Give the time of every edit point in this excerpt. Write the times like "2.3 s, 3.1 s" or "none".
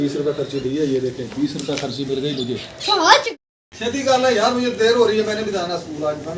3.3 s